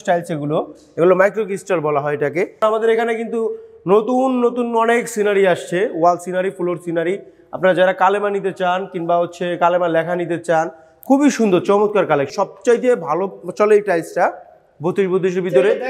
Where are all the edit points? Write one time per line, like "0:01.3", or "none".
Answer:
0:02.6
0:12.3